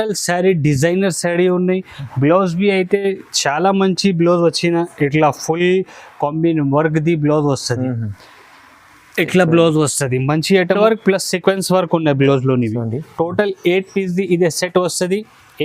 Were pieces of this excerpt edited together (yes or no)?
yes